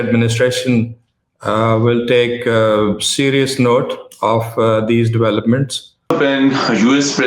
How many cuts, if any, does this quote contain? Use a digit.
1